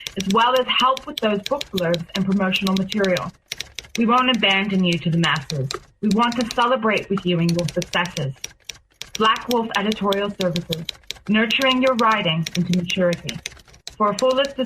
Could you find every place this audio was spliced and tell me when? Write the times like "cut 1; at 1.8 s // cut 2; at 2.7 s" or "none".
none